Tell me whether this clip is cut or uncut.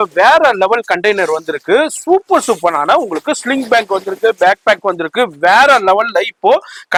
uncut